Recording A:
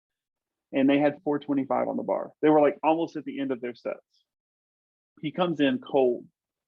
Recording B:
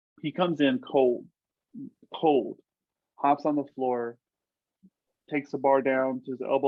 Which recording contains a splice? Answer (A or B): A